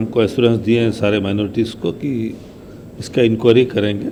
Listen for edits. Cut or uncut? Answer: uncut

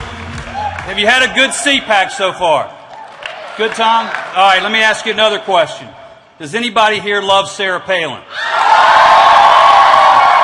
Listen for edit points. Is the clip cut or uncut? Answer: uncut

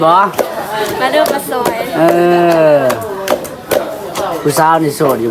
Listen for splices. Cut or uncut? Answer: uncut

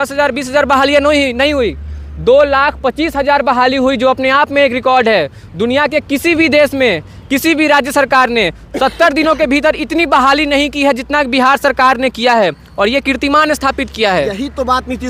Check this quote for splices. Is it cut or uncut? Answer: uncut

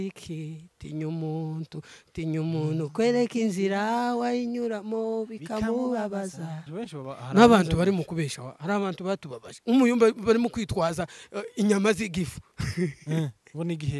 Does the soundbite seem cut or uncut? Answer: cut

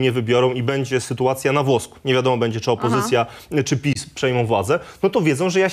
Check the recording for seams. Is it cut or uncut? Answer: uncut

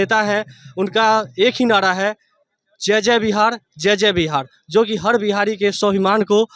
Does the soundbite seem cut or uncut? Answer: uncut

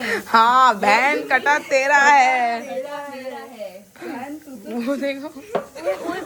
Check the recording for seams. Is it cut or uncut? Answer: uncut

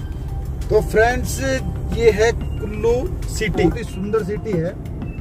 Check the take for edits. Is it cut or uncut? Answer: cut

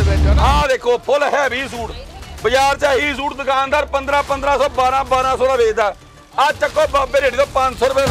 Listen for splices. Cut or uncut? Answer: uncut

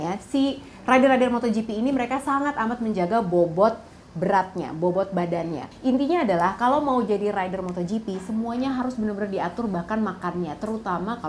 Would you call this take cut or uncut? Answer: cut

